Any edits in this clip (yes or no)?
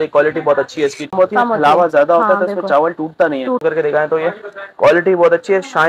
yes